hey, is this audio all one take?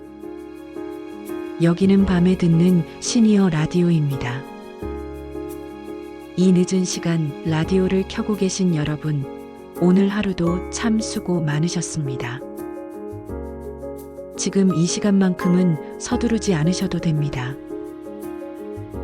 no; 5 cuts; at 4.5 s, 6.3 s, 12.5 s, 14.4 s, 18.1 s

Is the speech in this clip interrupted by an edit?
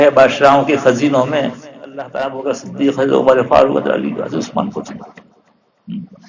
yes; 1 cut; at 2.0 s

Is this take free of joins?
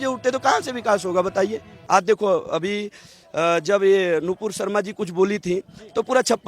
no; 1 cut; at 1.7 s

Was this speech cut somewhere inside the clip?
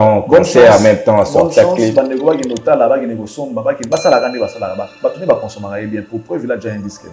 no; 0 cuts

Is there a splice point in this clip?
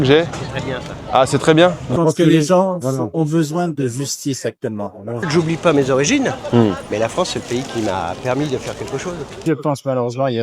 yes; 3 cuts; at 1.8 s, 5.2 s, 9.4 s

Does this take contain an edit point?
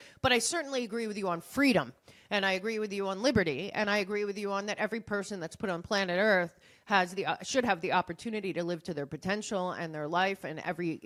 no; 0 cuts

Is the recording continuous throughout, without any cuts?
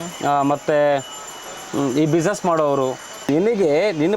no; 1 cut; at 3.3 s

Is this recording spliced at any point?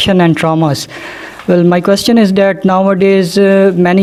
no; 0 cuts

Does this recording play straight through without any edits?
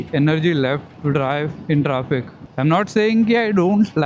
no; 2 cuts; at 0.9 s, 2.4 s

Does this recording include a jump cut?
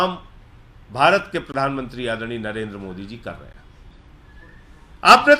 yes; 1 cut; at 3.9 s

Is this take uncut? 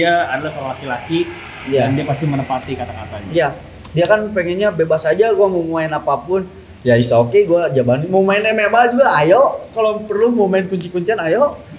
yes; 0 cuts

